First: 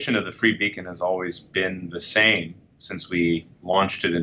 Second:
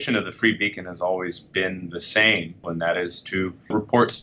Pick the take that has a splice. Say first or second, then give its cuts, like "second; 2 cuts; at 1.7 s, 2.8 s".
second; 1 cut; at 2.7 s